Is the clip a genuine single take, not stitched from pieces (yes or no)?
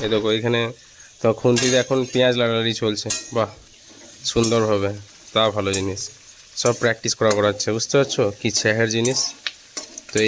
yes